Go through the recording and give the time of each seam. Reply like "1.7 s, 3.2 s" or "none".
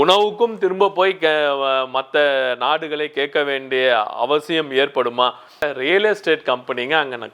5.6 s